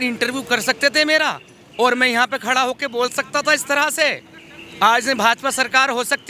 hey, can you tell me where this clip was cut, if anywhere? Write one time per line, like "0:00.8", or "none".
none